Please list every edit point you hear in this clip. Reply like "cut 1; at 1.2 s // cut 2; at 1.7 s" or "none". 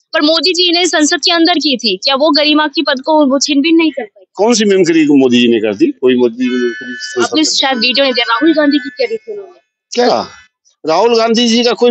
none

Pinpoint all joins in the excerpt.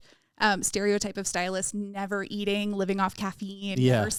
none

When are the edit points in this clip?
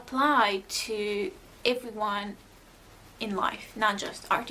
none

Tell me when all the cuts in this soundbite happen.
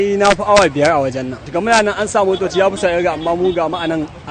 none

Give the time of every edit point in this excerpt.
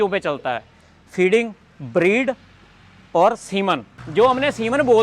cut 1; at 3.9 s

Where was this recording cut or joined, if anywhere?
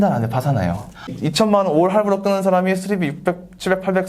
cut 1; at 1.1 s

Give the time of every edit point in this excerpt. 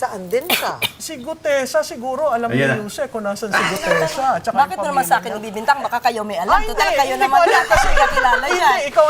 none

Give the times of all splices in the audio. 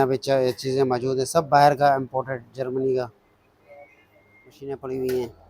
cut 1; at 4.6 s

